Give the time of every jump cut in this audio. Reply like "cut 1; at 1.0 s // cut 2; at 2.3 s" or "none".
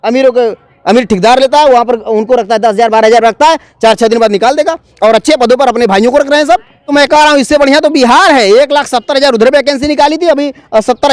cut 1; at 6.9 s